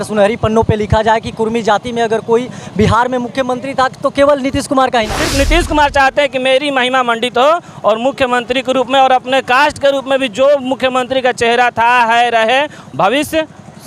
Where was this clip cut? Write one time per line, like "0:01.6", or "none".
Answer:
0:05.2